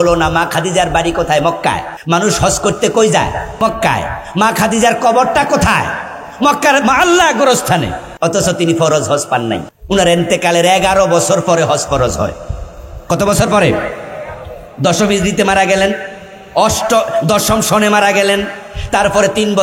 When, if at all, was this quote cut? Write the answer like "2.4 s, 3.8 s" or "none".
1.9 s, 3.5 s, 8.0 s, 9.7 s